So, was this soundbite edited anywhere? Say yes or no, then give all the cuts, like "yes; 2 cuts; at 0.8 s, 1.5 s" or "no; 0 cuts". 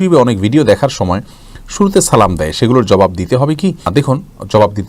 no; 0 cuts